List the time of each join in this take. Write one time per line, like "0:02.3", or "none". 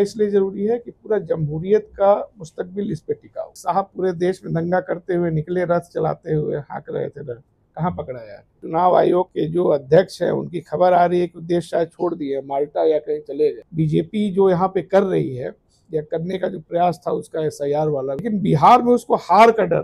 0:03.6
0:08.6
0:09.3
0:13.7
0:18.2